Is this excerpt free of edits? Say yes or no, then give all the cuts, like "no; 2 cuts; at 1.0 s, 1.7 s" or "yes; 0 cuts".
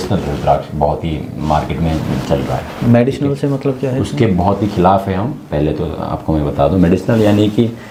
yes; 0 cuts